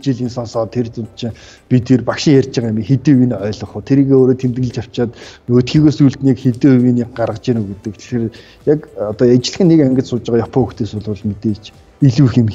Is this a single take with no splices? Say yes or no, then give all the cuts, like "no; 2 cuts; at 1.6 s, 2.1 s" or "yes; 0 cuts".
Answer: yes; 0 cuts